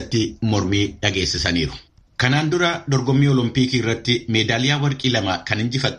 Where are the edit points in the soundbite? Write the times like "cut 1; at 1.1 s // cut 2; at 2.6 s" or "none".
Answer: cut 1; at 1.9 s

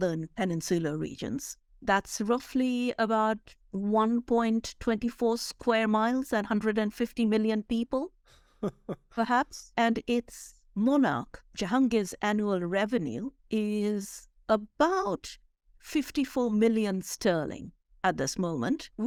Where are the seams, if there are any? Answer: none

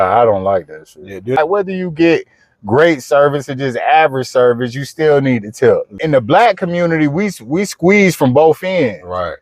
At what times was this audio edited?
cut 1; at 1.4 s // cut 2; at 5.9 s

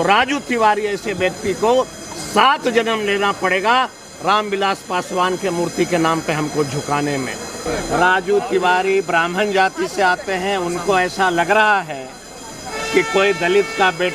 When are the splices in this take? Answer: cut 1; at 7.6 s

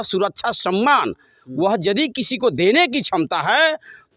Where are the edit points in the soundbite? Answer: none

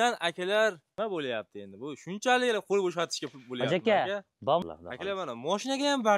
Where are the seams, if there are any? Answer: cut 1; at 0.8 s // cut 2; at 4.6 s

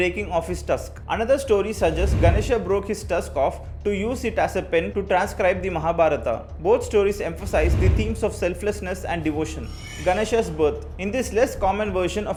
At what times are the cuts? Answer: none

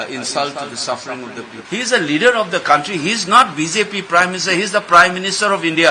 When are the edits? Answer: cut 1; at 1.5 s

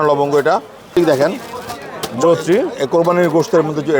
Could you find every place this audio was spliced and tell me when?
cut 1; at 1.0 s

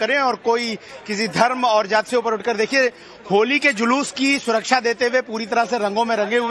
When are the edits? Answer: cut 1; at 3.4 s

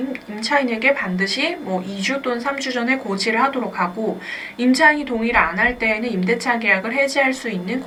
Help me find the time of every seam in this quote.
none

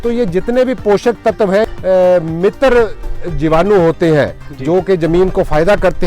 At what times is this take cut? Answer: cut 1; at 1.6 s

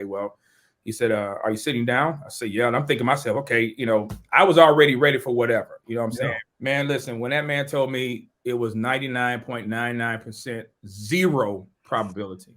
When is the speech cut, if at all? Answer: cut 1; at 6.5 s

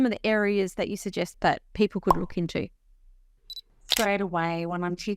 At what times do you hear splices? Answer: cut 1; at 1.3 s

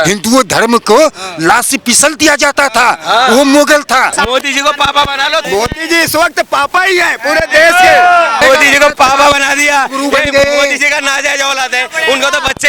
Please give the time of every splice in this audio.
cut 1; at 4.2 s // cut 2; at 5.5 s // cut 3; at 8.4 s

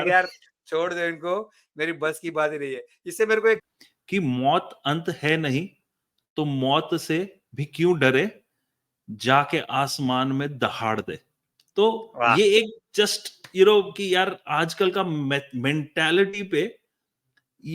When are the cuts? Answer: cut 1; at 3.8 s

